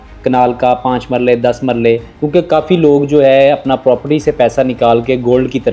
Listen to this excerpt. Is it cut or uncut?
cut